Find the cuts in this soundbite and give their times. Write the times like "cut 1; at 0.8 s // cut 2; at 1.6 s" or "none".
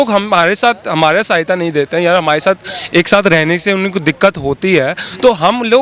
none